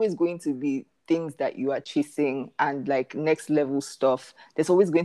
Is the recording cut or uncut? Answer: uncut